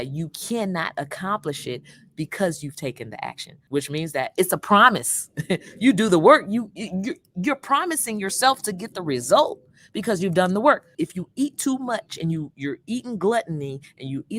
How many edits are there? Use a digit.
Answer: 2